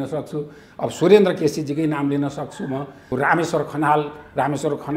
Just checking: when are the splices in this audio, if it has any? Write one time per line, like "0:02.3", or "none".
0:03.0